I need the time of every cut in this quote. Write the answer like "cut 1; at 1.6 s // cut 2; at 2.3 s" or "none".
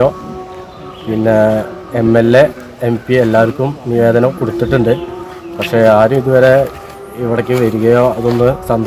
none